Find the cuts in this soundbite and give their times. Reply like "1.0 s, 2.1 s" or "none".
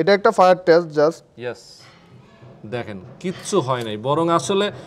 none